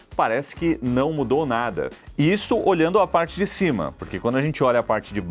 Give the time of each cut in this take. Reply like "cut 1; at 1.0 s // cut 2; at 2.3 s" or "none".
none